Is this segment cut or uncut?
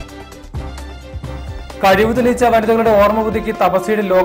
uncut